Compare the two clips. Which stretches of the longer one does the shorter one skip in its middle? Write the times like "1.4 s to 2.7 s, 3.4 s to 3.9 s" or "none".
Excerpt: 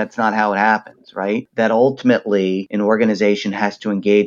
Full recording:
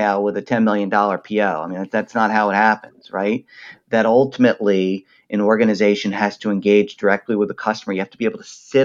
3.4 s to 3.8 s, 5.0 s to 5.3 s

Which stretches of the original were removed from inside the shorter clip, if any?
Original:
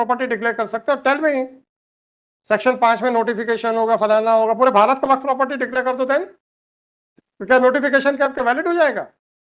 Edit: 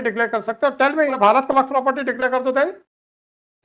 1.4 s to 4.7 s

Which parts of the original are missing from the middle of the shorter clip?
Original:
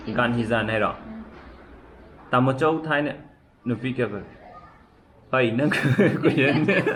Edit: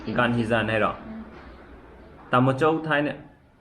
none

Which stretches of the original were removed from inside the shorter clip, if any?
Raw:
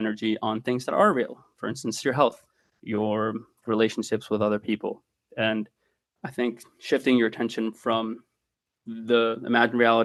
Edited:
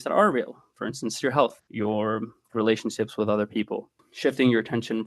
2.5 s to 2.8 s, 5.2 s to 6.7 s

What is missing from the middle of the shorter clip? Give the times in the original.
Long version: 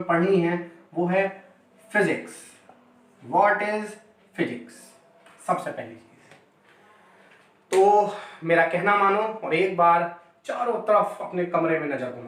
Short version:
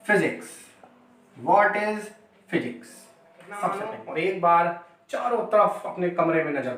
5.8 s to 9.3 s

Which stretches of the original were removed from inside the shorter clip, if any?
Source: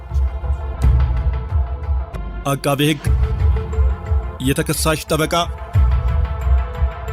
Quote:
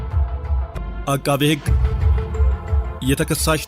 none

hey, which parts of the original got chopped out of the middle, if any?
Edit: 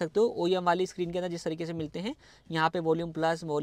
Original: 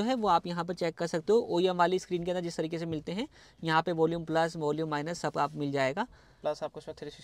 none

